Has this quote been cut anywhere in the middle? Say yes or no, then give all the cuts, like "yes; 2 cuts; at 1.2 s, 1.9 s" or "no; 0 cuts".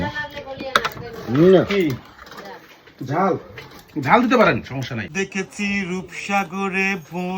yes; 1 cut; at 5.1 s